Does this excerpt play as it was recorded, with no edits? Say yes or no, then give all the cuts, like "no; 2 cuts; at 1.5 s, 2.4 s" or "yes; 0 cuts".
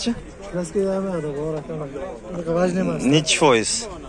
yes; 0 cuts